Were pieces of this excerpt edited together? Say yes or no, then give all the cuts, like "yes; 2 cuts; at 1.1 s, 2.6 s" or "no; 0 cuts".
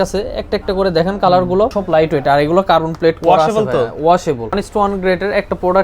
yes; 2 cuts; at 1.8 s, 4.6 s